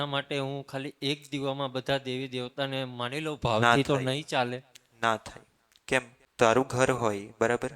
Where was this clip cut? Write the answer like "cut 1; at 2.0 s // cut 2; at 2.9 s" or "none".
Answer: cut 1; at 6.3 s